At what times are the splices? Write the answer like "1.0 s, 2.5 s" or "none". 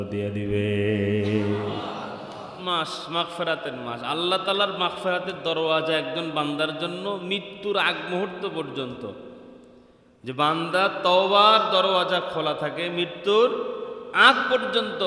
2.6 s